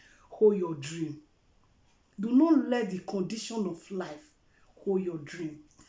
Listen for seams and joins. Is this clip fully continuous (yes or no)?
yes